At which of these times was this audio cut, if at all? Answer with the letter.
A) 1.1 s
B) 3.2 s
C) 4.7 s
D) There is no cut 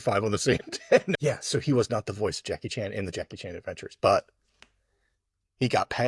A